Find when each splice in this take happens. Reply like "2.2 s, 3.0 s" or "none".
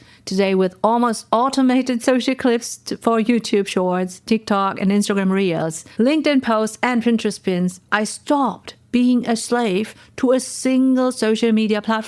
5.8 s, 7.9 s